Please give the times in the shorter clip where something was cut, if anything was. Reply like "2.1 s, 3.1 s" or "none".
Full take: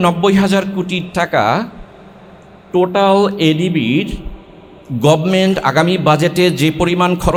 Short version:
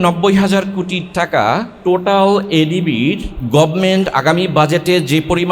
1.7 s, 3.3 s